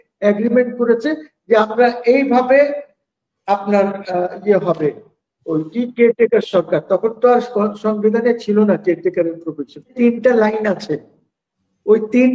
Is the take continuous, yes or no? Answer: no